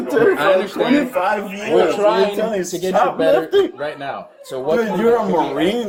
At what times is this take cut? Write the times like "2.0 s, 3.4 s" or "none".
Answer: none